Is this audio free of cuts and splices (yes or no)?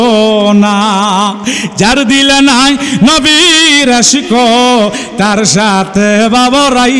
yes